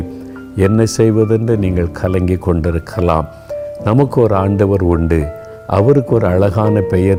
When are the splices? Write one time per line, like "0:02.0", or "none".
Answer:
none

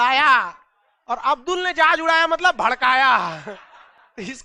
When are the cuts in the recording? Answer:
none

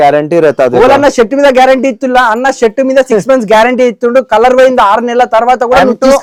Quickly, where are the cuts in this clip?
none

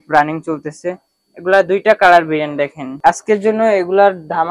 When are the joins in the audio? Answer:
0:02.8

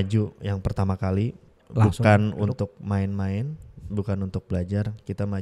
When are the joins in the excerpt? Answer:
0:01.6

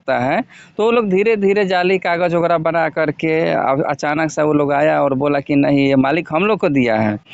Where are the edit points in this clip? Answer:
none

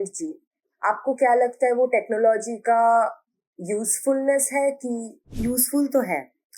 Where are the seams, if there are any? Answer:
0:05.3

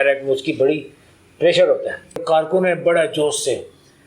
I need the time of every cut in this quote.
0:02.2

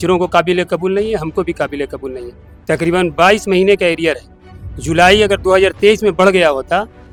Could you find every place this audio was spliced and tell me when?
none

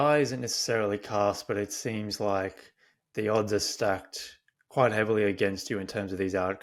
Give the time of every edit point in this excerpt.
none

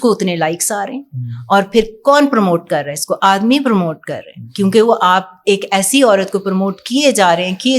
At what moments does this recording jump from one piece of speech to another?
none

